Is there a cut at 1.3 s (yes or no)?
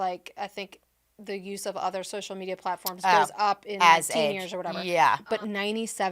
no